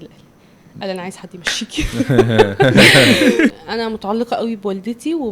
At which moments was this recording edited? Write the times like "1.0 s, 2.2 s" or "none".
3.5 s